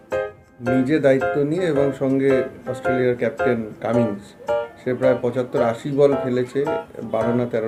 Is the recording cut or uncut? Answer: uncut